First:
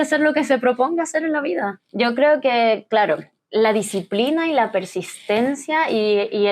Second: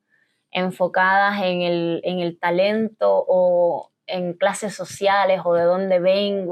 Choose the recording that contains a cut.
first; 2 cuts; at 1.8 s, 3.3 s

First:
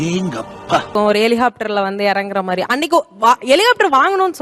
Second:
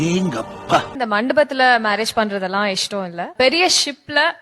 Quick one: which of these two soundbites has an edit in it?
second; 2 cuts; at 0.9 s, 3.3 s

